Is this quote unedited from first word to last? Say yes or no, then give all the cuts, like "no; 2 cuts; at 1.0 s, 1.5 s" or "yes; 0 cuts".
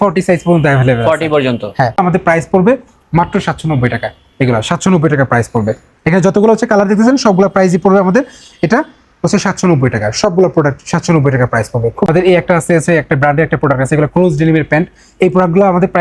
no; 2 cuts; at 2.0 s, 12.1 s